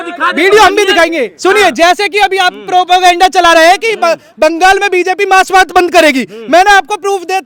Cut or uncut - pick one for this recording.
uncut